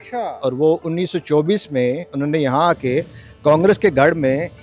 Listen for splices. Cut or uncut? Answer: uncut